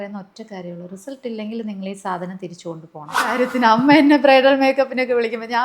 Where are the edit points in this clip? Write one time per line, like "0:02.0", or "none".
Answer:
0:03.4